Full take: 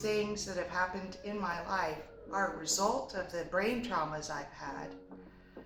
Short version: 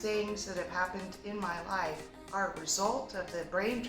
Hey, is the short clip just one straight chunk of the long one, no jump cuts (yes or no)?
yes